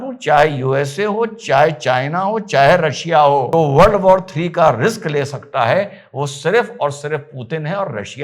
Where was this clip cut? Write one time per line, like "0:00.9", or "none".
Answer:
0:03.5